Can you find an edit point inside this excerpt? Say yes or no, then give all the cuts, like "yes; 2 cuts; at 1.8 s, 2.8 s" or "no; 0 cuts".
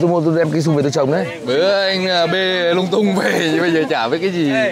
no; 0 cuts